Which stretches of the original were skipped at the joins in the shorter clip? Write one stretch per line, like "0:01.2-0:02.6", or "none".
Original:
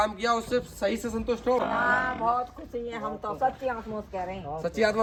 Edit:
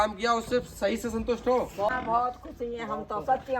0:01.8-0:01.9